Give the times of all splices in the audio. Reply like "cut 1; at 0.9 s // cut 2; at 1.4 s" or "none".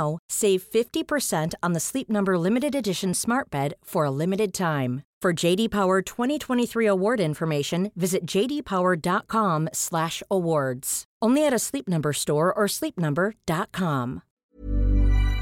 cut 1; at 14.3 s